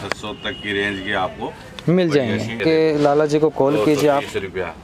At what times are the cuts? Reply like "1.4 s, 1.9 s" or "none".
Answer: 2.6 s